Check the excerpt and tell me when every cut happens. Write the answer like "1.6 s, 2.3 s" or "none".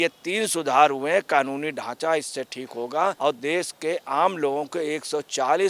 3.2 s